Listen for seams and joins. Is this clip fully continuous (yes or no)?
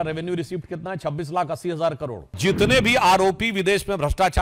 no